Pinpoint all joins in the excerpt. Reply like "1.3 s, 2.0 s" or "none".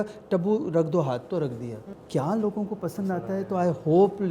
1.9 s